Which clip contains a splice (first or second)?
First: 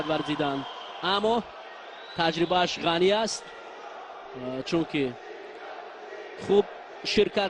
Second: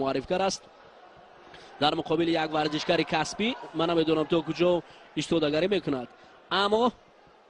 second